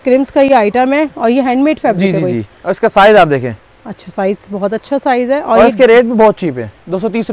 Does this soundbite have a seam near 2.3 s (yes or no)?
no